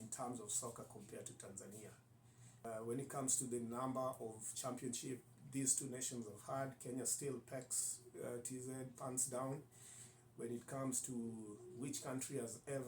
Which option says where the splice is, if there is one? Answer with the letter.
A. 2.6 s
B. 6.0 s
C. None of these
A